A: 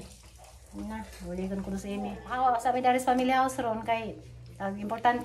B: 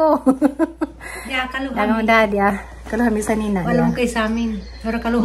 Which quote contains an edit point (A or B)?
A